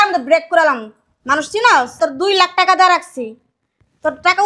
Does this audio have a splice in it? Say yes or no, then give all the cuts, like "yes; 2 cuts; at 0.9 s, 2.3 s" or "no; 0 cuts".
yes; 1 cut; at 2.0 s